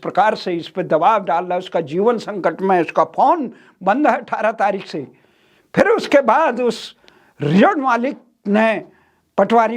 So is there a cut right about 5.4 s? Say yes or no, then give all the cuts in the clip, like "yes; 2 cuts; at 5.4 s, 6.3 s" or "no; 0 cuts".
no; 0 cuts